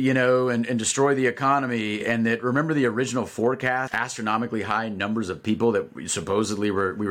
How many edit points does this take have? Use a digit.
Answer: 1